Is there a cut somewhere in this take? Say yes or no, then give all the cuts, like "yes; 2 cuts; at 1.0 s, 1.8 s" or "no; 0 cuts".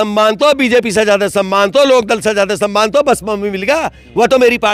no; 0 cuts